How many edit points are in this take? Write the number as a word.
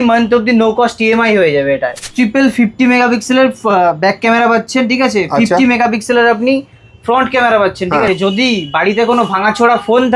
two